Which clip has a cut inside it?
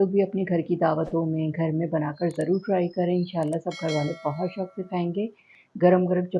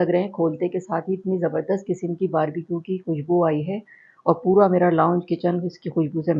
first; 1 cut; at 5.5 s

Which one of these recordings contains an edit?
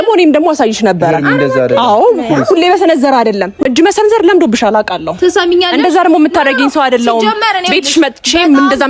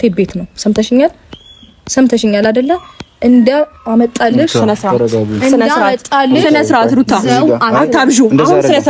first; 1 cut; at 3.5 s

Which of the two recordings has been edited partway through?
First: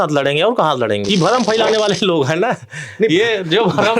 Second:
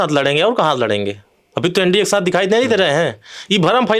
first; 1 cut; at 1.0 s

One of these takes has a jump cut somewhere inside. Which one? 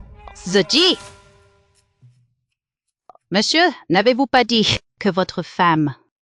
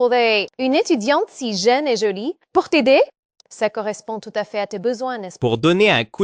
second; 1 cut; at 5.3 s

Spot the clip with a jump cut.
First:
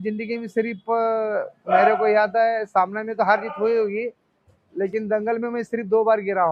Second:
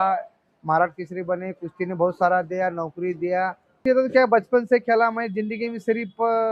second; 1 cut; at 3.8 s

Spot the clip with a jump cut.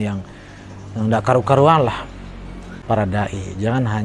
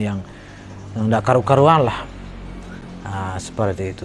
first; 1 cut; at 2.7 s

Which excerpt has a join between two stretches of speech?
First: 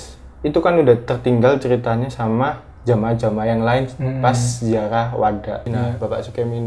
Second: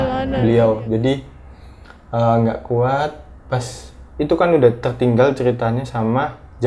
first; 1 cut; at 5.7 s

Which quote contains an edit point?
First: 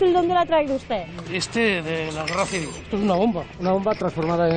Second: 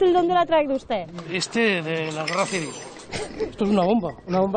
first; 1 cut; at 2.8 s

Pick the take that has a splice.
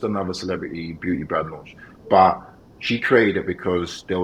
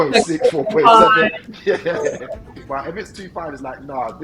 second; 1 cut; at 2.6 s

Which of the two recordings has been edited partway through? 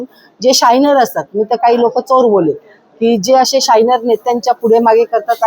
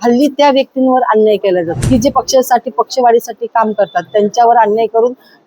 second; 1 cut; at 1.8 s

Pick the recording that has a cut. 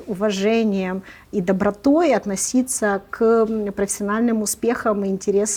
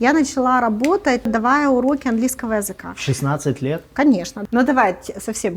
second; 2 cuts; at 1.3 s, 4.3 s

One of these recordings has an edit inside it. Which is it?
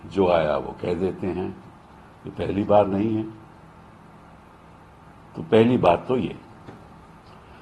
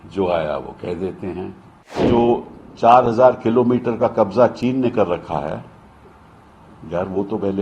second; 1 cut; at 2.0 s

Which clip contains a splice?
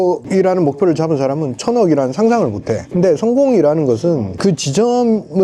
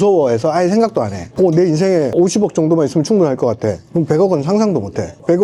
first; 2 cuts; at 2.8 s, 4.3 s

